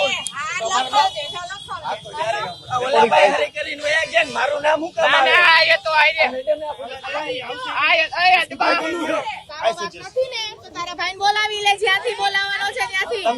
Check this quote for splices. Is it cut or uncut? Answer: cut